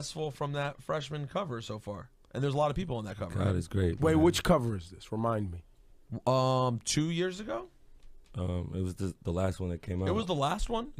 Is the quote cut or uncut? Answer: cut